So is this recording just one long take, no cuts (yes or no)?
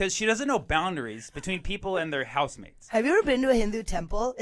yes